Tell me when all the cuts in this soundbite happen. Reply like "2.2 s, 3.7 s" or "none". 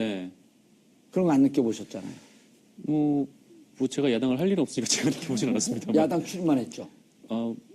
0.9 s